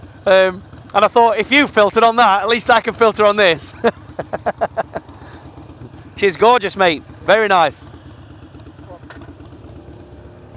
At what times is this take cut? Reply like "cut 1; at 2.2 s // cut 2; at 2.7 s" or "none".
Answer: none